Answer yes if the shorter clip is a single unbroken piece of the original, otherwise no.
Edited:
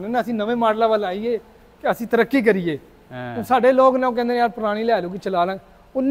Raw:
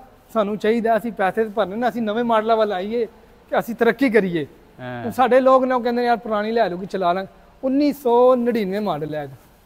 yes